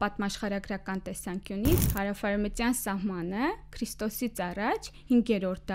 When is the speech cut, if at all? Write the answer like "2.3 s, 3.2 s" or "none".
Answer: 1.9 s